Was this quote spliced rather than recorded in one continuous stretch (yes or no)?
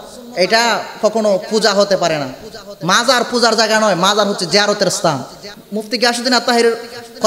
yes